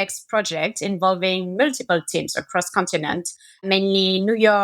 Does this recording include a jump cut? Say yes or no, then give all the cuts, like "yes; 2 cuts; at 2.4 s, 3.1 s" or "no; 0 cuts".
yes; 1 cut; at 3.6 s